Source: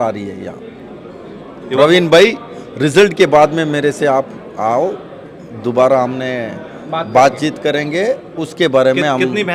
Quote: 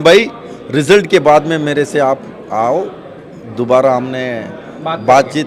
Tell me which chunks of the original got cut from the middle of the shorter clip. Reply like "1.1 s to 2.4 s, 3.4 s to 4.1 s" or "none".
none